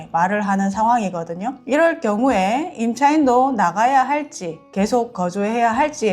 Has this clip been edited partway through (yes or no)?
yes